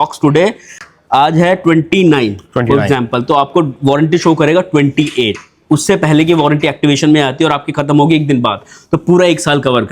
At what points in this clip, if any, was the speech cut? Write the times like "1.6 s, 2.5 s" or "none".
none